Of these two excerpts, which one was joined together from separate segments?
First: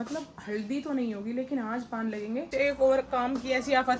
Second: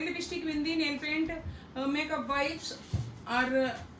first; 1 cut; at 2.5 s

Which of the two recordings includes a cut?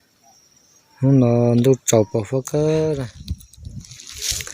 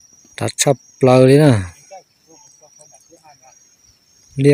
first; 1 cut; at 3.3 s

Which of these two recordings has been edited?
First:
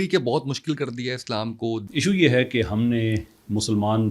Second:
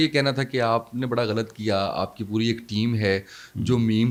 first; 1 cut; at 1.8 s

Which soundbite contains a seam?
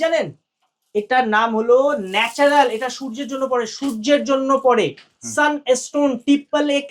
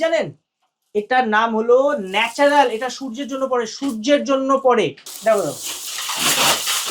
second; 1 cut; at 5.1 s

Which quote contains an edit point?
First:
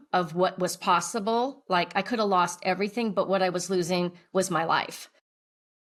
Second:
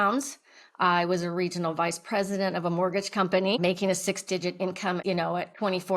second; 1 cut; at 5.0 s

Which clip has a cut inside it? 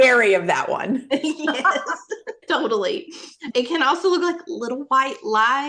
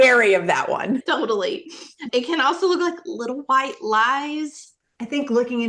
second; 2 cuts; at 1.0 s, 4.7 s

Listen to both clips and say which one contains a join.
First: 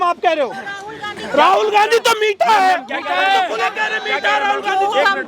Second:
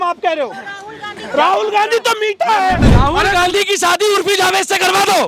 second; 1 cut; at 2.9 s

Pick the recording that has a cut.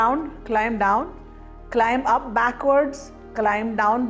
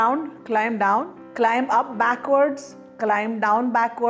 second; 1 cut; at 1.2 s

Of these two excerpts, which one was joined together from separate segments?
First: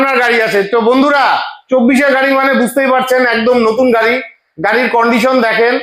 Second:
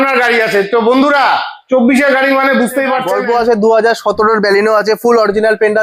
second; 1 cut; at 3.1 s

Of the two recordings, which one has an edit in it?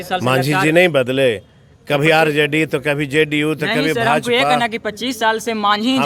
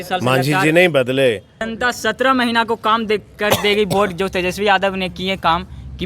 second; 1 cut; at 1.7 s

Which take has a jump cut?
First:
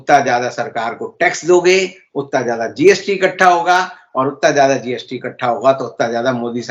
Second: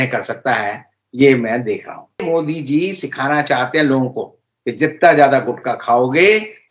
second; 1 cut; at 2.2 s

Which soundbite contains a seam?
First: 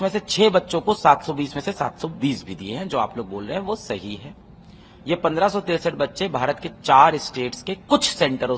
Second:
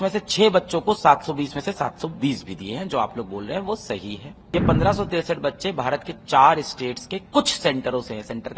second; 1 cut; at 4.3 s

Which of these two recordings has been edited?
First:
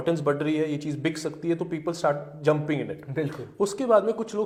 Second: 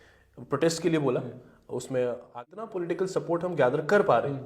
second; 1 cut; at 2.3 s

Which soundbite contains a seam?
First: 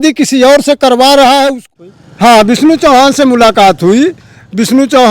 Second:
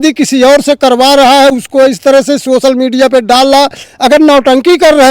first; 1 cut; at 1.6 s

